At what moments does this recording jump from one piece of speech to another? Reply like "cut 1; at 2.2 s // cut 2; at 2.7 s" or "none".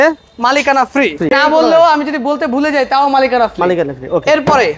cut 1; at 1.3 s